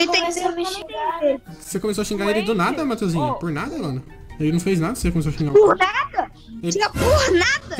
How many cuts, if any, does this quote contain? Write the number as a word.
zero